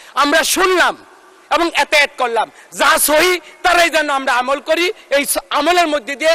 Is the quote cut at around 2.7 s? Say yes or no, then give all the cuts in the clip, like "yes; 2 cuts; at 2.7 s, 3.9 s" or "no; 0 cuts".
no; 0 cuts